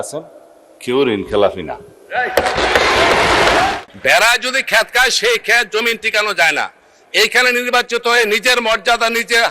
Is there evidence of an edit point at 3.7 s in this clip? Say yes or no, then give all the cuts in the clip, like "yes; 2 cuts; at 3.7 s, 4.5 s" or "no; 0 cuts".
yes; 1 cut; at 3.7 s